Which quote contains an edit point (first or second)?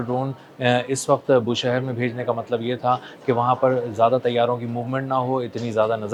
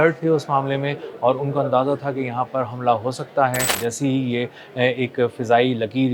second